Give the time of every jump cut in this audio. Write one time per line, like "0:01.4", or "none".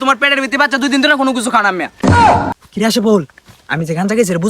0:02.5